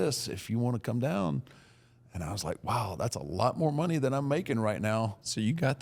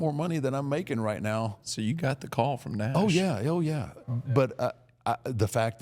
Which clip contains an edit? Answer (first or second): second